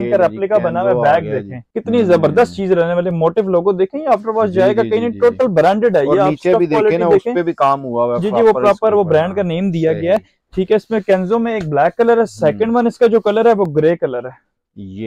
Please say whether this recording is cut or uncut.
uncut